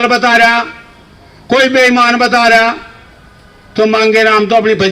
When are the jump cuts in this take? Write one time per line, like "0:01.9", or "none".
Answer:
none

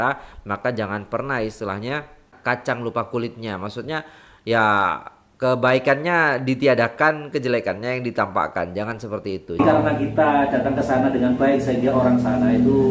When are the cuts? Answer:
0:02.3
0:09.6

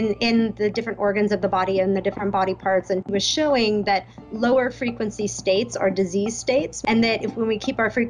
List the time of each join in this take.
0:03.1
0:06.7

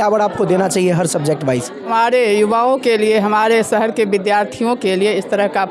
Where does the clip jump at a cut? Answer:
0:01.9

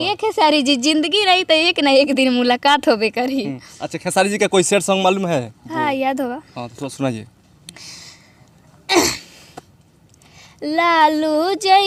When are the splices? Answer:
none

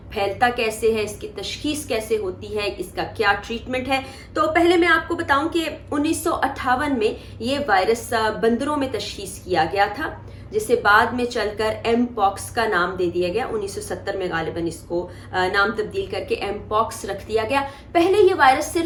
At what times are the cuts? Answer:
none

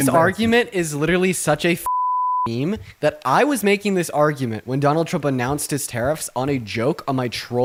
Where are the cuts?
none

